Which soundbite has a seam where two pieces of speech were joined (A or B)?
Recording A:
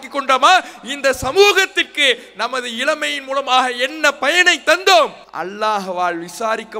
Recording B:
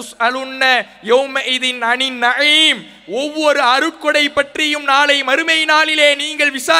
A